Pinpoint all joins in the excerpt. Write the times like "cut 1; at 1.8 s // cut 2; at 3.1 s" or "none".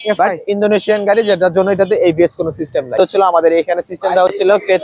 cut 1; at 2.9 s